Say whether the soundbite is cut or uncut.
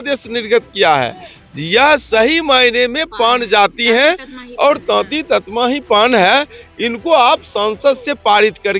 uncut